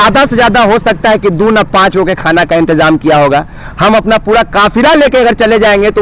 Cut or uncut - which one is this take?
uncut